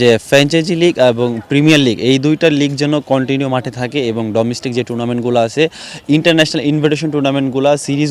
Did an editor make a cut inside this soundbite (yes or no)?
no